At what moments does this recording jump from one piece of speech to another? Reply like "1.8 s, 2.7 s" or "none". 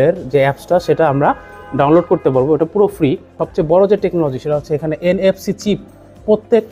3.4 s